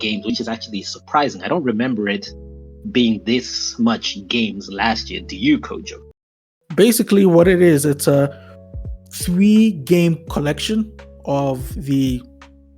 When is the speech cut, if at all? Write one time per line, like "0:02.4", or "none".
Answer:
0:06.2